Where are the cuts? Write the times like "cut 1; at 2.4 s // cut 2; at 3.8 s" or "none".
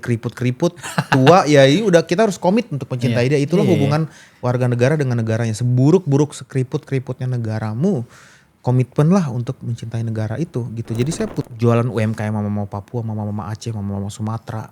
cut 1; at 11.4 s